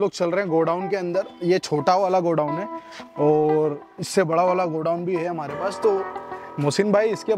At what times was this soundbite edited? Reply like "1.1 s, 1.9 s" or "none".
none